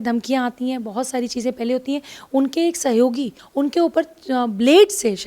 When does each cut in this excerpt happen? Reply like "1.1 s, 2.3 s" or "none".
3.4 s